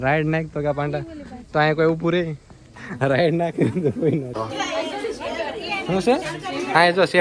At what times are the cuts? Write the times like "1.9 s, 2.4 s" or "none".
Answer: 4.3 s